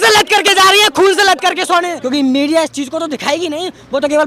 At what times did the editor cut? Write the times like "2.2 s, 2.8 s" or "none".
2.0 s